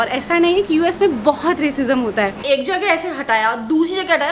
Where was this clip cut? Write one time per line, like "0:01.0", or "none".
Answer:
0:02.4